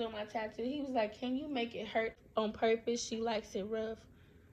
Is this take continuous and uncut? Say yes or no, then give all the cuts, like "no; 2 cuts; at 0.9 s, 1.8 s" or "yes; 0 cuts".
no; 1 cut; at 2.2 s